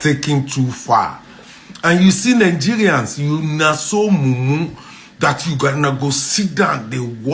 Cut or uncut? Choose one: uncut